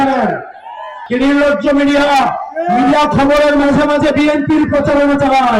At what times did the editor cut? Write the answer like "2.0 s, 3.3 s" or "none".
1.0 s